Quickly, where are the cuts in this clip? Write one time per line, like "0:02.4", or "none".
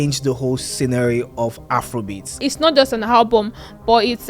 0:02.5